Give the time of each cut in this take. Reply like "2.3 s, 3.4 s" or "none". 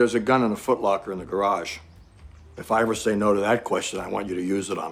none